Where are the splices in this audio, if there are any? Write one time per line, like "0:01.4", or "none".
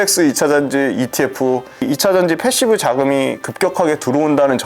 0:01.8

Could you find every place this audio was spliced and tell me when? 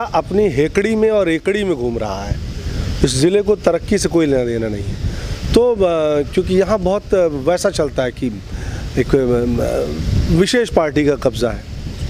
none

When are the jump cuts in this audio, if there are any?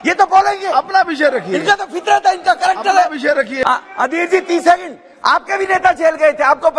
0:03.5

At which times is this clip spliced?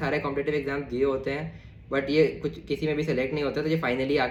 none

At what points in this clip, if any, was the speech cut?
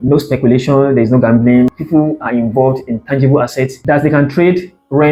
none

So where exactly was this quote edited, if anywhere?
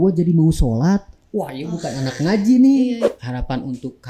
0:03.1

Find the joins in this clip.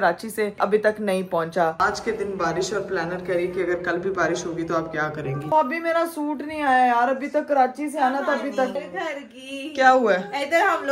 0:01.8
0:05.5
0:08.8

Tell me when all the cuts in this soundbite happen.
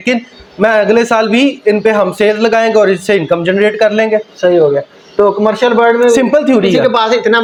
none

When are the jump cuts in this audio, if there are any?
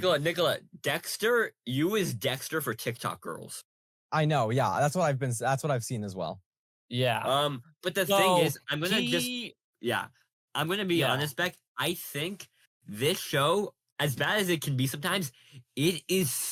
none

